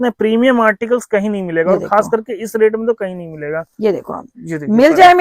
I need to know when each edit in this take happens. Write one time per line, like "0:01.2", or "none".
none